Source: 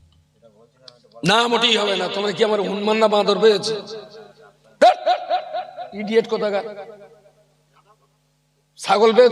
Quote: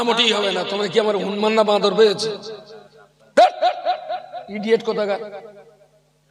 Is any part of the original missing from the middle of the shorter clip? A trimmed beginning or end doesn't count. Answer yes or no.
no